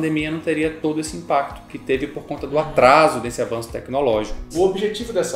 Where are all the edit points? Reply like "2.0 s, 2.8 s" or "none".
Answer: 0.8 s, 1.7 s, 4.4 s